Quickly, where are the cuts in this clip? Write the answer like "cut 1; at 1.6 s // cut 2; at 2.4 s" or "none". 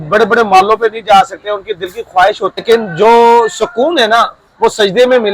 cut 1; at 2.6 s